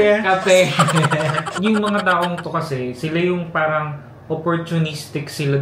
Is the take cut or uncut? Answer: cut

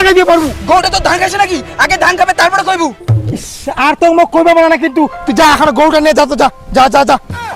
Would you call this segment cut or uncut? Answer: uncut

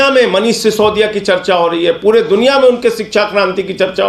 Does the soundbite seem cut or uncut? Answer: uncut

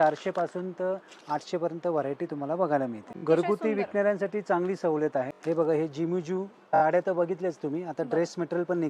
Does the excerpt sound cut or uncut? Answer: cut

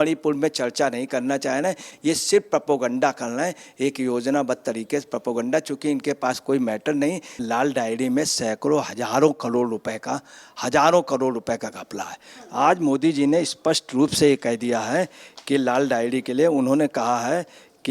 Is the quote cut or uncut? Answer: cut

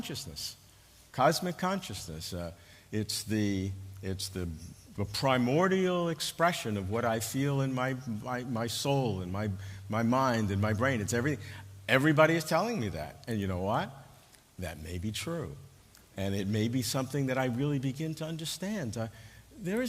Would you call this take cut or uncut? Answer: cut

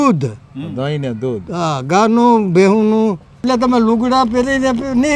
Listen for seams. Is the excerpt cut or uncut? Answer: cut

